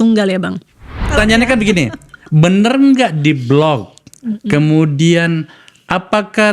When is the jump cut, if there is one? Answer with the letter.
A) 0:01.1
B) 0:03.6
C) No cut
A